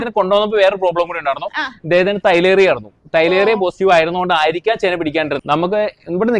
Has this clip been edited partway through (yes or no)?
yes